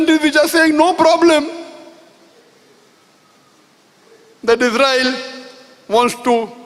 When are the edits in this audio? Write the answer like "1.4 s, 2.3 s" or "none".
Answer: none